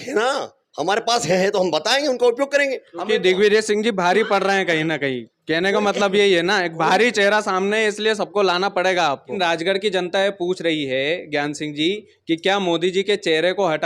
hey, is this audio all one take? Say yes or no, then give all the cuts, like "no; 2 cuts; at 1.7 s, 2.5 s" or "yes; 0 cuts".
no; 2 cuts; at 2.9 s, 9.4 s